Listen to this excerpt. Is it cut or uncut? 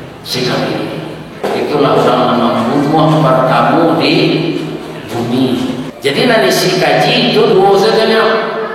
cut